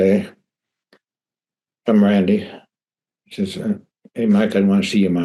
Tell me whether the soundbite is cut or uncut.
uncut